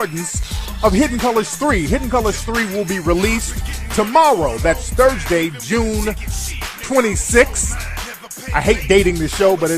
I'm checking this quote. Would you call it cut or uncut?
cut